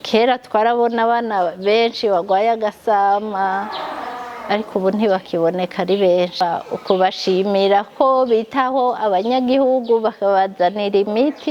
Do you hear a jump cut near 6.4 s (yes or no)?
yes